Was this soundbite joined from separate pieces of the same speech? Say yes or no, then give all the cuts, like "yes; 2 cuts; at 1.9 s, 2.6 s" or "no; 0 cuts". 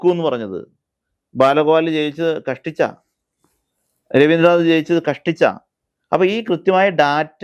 no; 0 cuts